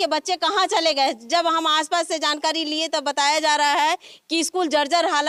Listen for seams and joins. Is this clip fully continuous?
yes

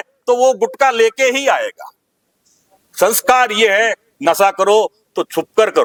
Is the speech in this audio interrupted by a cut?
no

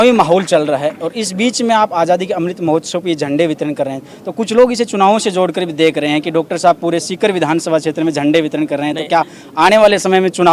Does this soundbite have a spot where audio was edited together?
no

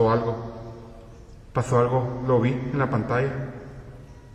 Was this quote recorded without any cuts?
yes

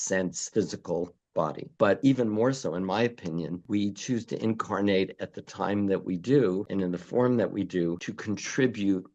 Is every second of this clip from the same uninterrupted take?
no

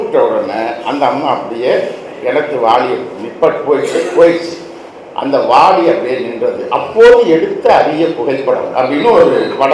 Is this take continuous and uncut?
yes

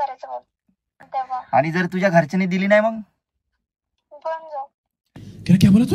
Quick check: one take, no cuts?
no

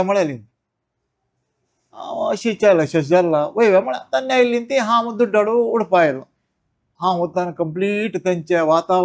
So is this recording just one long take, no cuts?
no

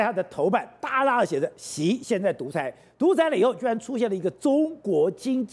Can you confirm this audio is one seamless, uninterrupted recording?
yes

